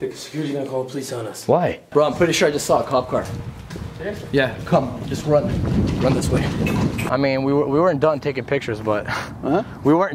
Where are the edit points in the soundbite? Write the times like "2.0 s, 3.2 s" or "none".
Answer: 1.8 s, 7.0 s